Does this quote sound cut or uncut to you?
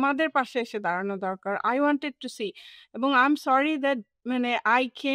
uncut